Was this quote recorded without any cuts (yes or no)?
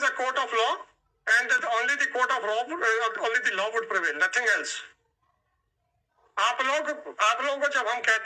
yes